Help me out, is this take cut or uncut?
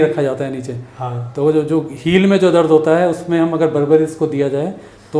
uncut